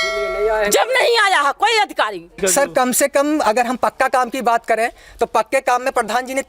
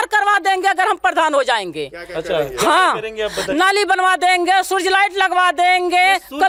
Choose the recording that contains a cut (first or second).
first